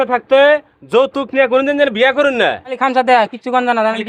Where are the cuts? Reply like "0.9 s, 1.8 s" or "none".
2.8 s